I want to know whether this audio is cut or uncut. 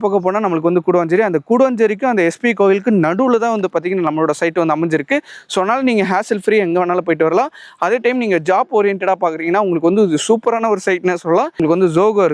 uncut